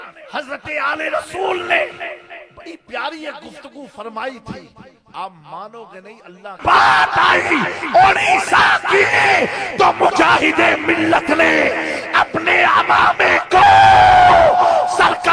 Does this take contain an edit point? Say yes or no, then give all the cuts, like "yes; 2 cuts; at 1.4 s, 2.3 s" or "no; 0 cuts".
yes; 1 cut; at 6.6 s